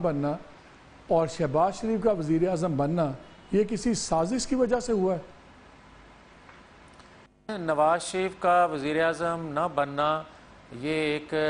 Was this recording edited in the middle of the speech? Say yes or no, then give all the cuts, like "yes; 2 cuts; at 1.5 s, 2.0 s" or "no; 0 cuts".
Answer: no; 0 cuts